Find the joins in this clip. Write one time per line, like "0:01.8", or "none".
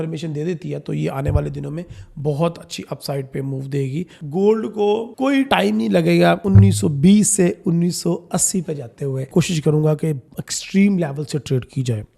0:04.2
0:09.3